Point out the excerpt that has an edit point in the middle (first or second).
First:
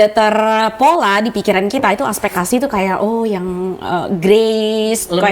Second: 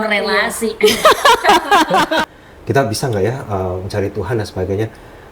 second